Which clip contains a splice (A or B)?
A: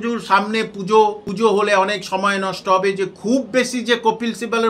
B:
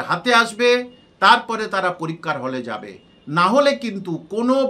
A